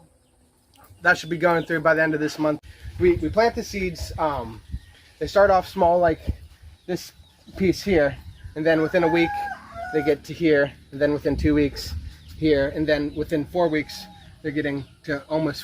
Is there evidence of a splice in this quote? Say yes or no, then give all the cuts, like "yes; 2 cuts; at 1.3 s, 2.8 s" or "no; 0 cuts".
yes; 1 cut; at 2.7 s